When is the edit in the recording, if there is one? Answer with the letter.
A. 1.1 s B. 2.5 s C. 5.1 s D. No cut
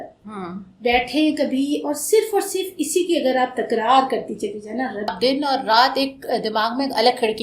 C